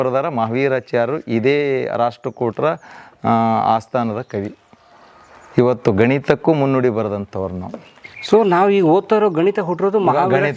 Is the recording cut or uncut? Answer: uncut